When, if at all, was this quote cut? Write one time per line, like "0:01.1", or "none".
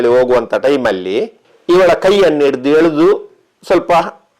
none